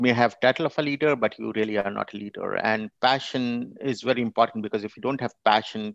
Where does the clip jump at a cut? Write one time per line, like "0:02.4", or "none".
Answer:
none